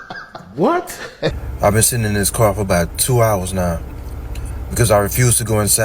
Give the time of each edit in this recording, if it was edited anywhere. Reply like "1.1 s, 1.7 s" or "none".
1.4 s